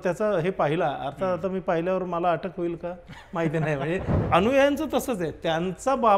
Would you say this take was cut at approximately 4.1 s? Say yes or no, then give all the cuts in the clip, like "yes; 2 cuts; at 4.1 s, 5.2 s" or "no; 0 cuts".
yes; 1 cut; at 4.1 s